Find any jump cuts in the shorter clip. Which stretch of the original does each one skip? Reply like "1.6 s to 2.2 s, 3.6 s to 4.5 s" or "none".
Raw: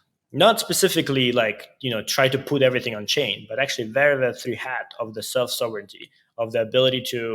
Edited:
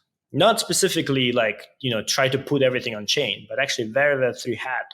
none